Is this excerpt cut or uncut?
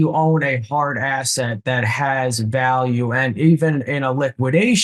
uncut